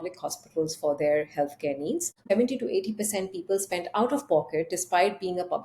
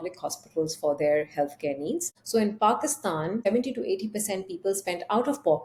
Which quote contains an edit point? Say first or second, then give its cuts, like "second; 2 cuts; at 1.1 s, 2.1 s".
first; 1 cut; at 2.2 s